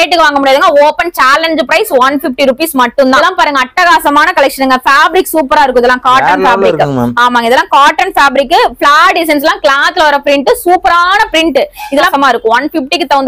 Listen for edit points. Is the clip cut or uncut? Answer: uncut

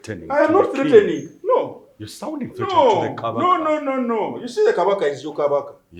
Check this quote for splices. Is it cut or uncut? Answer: uncut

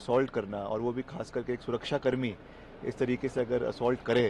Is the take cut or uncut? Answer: uncut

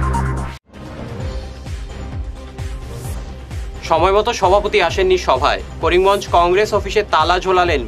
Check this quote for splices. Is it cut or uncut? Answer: cut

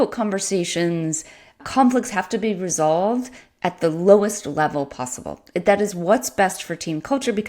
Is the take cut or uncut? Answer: cut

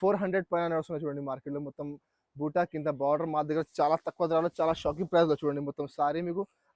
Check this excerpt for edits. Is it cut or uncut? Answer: uncut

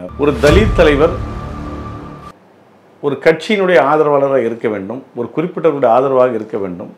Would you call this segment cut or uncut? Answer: uncut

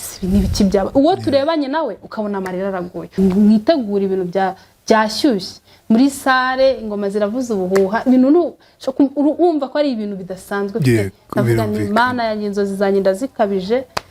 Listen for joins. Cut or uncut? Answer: cut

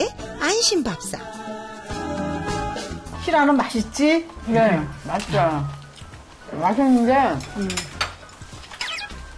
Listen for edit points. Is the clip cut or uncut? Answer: cut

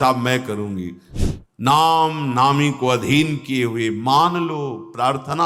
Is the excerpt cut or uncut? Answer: cut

